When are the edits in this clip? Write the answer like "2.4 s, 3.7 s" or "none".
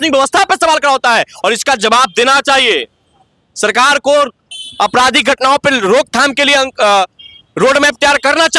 none